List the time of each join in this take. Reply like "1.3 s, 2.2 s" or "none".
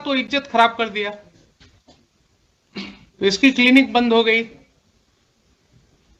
none